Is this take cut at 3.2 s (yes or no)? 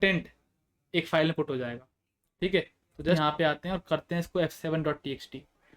yes